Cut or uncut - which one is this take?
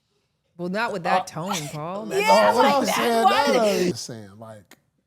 cut